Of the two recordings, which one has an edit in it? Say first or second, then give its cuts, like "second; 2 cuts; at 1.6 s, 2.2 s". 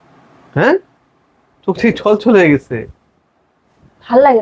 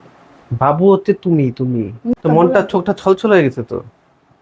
second; 1 cut; at 2.1 s